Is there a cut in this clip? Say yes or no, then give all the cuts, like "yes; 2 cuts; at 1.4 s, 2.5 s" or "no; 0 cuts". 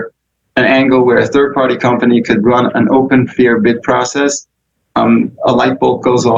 no; 0 cuts